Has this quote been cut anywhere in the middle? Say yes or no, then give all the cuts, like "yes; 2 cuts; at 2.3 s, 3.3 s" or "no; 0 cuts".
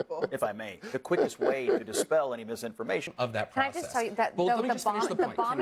yes; 1 cut; at 3.1 s